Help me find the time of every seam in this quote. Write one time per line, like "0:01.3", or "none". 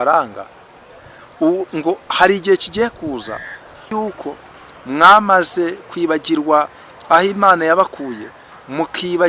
0:03.9